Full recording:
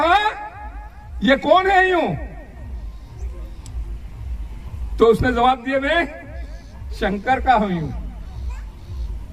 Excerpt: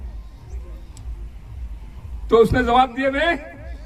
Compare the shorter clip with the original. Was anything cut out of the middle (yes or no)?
no